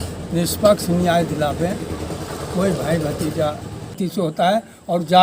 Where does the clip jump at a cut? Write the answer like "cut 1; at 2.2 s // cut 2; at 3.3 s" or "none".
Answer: cut 1; at 3.9 s